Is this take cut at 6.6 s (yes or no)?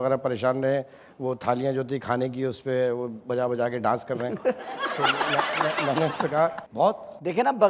yes